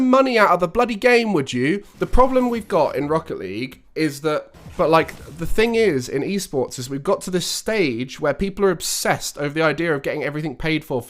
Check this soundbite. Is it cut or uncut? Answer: cut